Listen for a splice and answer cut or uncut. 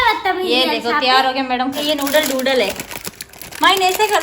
cut